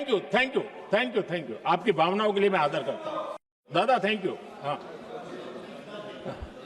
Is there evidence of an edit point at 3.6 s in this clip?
yes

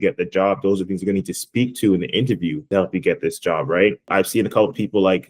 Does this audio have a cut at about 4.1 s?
yes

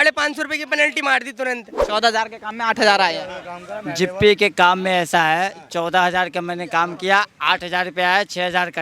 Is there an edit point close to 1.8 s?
yes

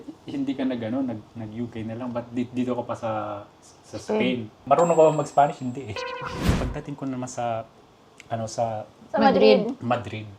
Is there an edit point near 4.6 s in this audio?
yes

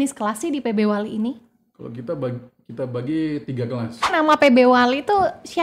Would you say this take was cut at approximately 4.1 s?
yes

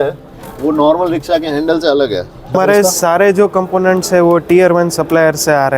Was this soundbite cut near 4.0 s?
no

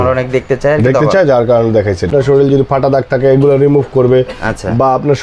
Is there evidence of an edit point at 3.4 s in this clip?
no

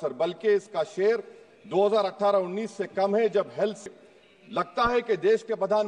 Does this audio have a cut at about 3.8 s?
yes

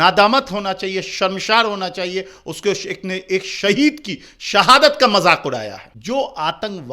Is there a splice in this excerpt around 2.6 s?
no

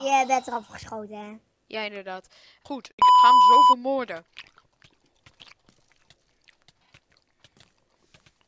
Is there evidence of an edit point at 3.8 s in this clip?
yes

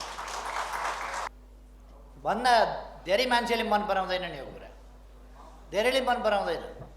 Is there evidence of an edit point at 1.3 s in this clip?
yes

